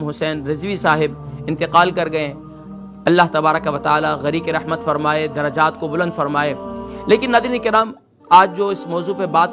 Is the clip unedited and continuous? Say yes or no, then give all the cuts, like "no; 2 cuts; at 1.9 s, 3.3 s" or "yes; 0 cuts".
yes; 0 cuts